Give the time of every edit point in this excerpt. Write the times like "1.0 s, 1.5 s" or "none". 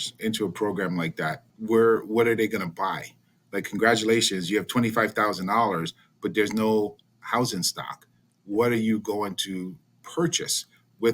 1.5 s